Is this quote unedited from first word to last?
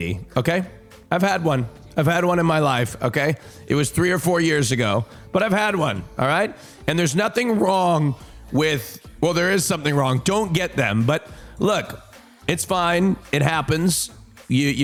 yes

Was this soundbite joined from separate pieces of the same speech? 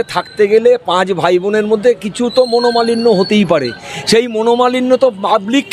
no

